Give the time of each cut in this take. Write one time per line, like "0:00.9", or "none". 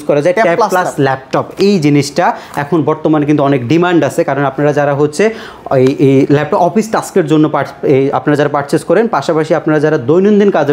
none